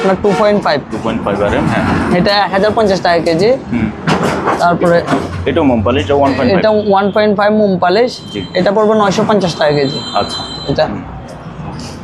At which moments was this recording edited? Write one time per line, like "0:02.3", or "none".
none